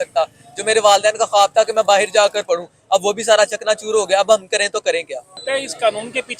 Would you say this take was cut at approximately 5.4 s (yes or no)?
yes